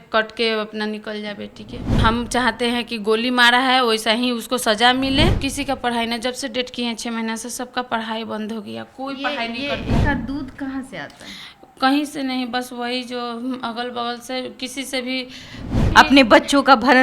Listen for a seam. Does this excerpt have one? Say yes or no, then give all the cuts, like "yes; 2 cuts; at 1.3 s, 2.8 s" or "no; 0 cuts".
yes; 4 cuts; at 2.0 s, 5.4 s, 10.0 s, 15.7 s